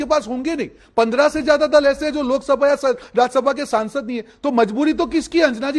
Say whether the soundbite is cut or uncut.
uncut